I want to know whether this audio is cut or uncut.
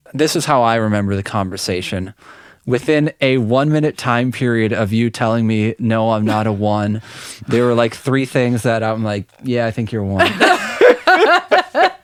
uncut